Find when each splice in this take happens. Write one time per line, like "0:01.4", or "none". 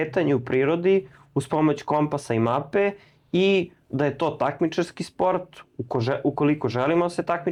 none